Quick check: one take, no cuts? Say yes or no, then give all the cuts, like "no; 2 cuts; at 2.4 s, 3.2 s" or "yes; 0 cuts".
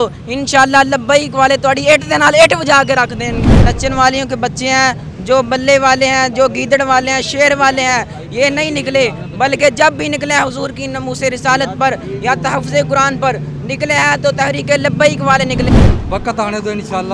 no; 2 cuts; at 3.3 s, 15.7 s